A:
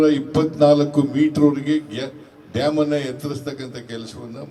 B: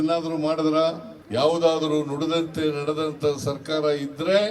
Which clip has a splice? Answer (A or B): B